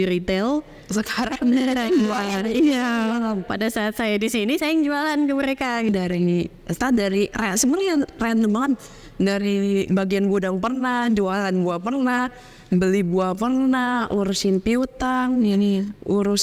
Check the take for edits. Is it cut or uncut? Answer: cut